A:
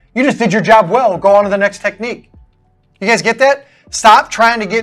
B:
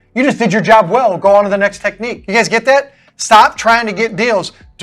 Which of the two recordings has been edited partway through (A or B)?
B